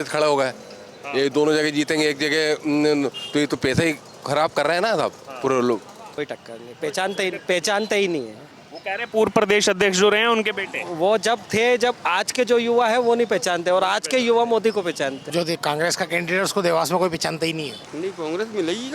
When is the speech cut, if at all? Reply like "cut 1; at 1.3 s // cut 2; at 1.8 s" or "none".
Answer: cut 1; at 6.2 s // cut 2; at 15.2 s // cut 3; at 17.8 s